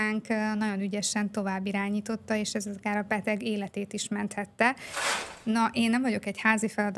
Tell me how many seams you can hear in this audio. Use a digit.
1